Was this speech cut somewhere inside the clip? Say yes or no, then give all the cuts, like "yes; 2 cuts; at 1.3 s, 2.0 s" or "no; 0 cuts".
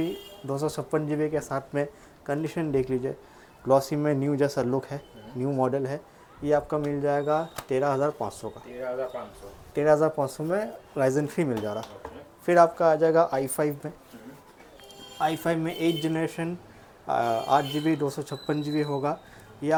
no; 0 cuts